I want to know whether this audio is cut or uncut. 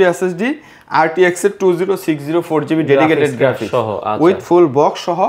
uncut